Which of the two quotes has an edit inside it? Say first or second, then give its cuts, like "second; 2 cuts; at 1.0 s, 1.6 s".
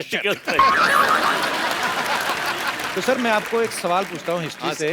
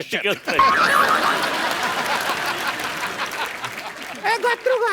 first; 1 cut; at 2.9 s